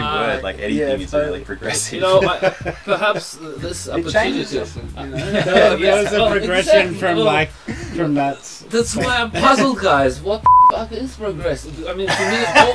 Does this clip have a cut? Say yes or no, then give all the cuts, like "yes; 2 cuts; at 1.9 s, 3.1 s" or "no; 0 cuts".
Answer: no; 0 cuts